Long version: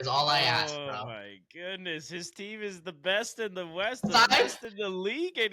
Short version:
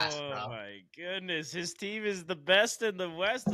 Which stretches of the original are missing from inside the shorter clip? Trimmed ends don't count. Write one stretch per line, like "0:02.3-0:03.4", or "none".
none